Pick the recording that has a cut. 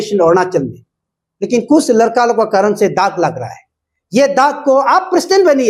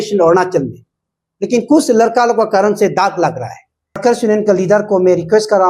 second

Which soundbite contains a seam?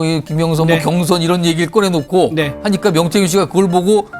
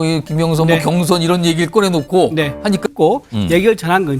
second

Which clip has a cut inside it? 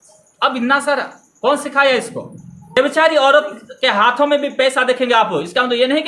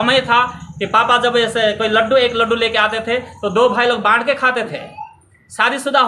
first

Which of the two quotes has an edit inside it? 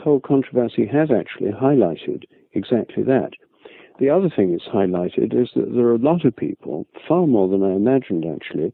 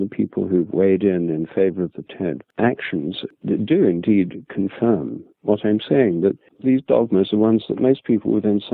second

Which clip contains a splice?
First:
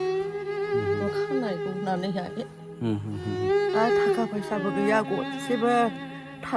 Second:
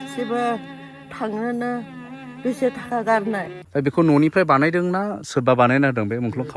second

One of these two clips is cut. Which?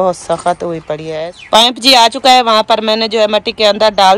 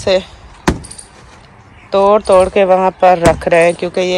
first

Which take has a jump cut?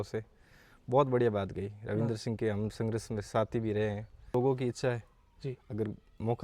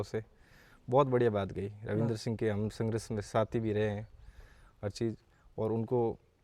first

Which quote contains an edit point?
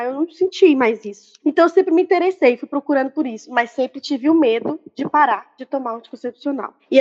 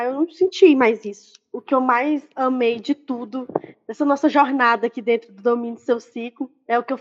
first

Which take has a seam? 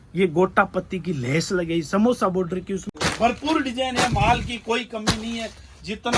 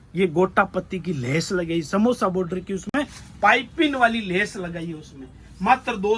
first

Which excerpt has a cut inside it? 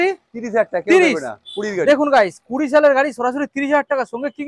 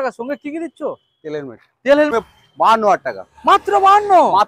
second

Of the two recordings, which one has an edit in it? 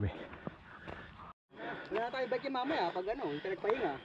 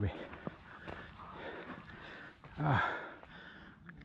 first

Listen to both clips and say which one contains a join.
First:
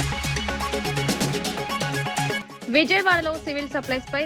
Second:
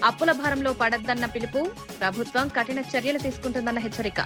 first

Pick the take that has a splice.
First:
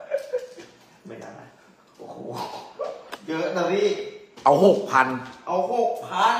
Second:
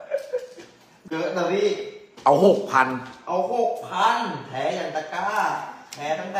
second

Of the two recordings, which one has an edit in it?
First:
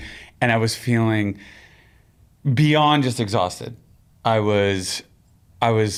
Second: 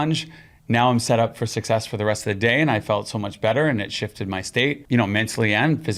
second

